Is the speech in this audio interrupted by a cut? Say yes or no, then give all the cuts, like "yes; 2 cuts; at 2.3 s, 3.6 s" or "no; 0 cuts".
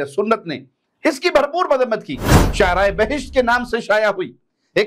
yes; 1 cut; at 2.4 s